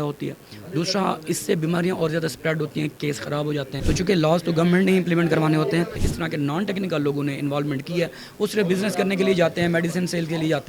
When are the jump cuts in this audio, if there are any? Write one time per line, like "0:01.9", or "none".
0:03.7
0:06.0